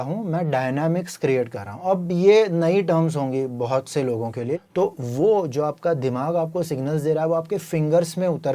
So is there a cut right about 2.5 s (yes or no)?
no